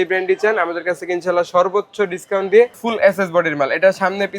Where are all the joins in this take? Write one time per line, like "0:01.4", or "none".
0:02.8